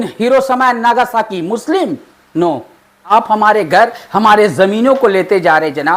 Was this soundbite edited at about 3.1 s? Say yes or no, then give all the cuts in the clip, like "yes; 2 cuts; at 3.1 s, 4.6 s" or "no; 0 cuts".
yes; 1 cut; at 3.1 s